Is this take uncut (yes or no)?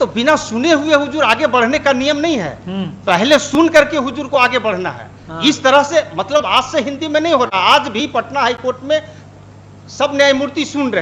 yes